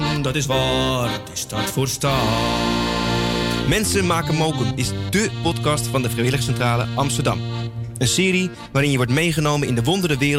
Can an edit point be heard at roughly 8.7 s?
no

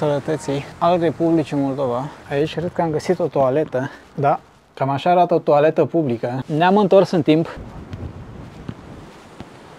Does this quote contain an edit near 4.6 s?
yes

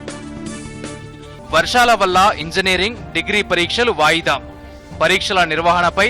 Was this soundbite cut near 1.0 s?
yes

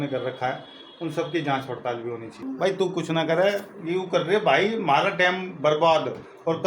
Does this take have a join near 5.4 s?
no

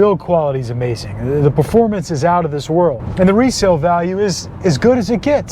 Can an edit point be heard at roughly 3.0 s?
yes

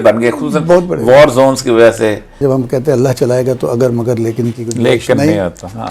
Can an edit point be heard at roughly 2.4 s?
yes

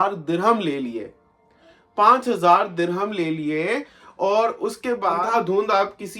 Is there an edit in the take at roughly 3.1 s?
no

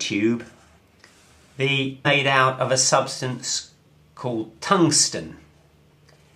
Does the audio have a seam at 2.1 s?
no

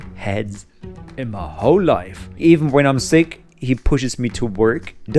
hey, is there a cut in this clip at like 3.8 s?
no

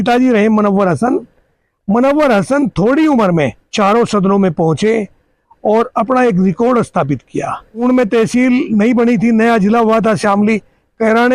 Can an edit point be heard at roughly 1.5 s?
no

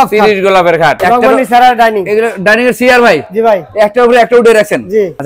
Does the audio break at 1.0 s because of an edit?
yes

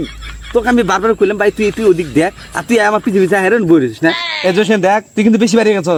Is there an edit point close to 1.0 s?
no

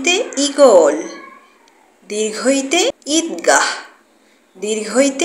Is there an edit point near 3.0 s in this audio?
yes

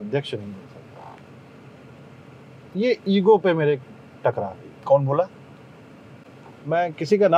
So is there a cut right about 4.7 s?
no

